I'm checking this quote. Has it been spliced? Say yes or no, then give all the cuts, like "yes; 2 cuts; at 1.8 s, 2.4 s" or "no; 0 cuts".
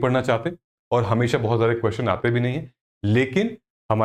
no; 0 cuts